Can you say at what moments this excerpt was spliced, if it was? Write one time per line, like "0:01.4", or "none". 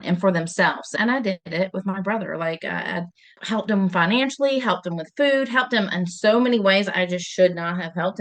0:00.9
0:03.2